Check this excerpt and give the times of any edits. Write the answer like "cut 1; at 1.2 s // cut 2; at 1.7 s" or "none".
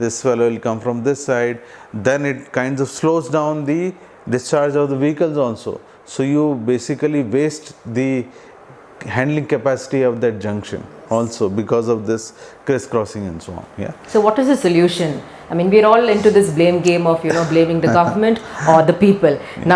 none